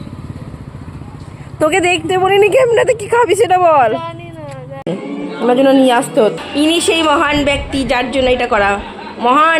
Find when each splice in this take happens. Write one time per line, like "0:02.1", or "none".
0:04.9